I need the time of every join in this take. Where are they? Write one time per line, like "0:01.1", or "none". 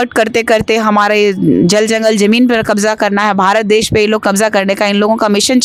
none